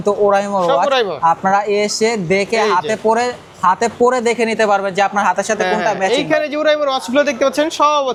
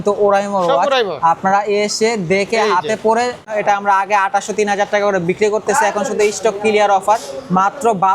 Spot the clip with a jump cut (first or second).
second